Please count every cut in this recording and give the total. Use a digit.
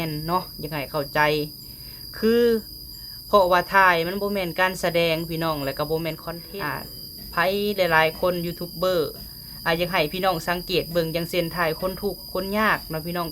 1